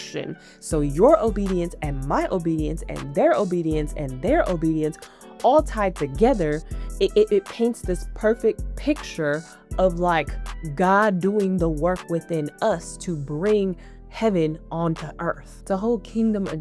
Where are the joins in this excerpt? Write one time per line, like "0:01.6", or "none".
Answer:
0:15.5